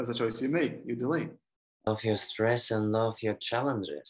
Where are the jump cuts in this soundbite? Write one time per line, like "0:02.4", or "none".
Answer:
0:01.9